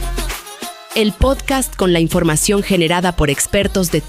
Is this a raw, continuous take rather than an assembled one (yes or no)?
no